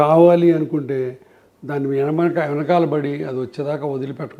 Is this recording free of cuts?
yes; 0 cuts

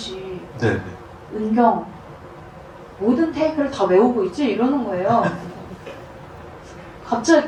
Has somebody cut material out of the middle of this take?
no; 0 cuts

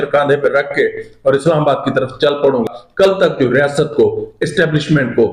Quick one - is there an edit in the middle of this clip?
yes; 1 cut; at 2.6 s

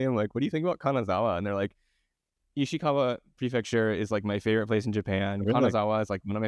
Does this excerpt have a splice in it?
no; 0 cuts

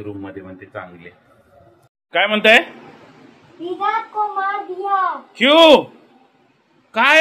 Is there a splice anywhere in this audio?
no; 0 cuts

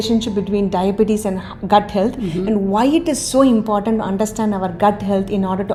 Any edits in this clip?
no; 0 cuts

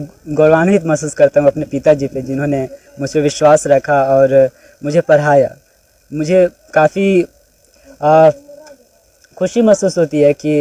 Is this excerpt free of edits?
yes; 0 cuts

